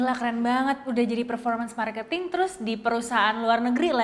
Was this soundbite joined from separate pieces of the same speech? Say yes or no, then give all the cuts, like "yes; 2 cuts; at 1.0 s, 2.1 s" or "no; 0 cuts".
no; 0 cuts